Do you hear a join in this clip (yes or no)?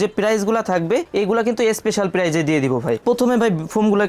yes